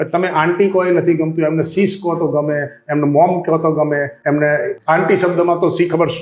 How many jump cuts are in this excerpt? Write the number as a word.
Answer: two